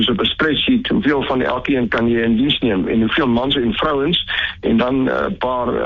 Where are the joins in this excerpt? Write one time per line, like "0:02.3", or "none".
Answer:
none

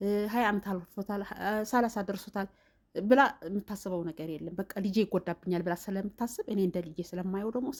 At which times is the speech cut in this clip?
none

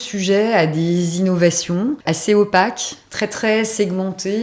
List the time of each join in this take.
0:02.0

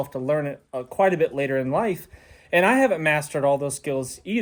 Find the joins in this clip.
none

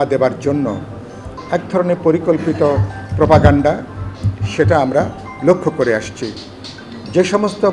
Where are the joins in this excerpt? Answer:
none

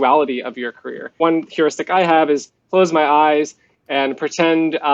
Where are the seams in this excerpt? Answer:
0:01.1

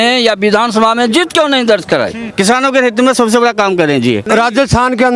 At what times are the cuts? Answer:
0:02.2
0:04.2

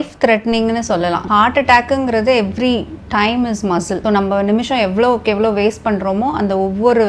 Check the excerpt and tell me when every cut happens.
0:01.2
0:04.0

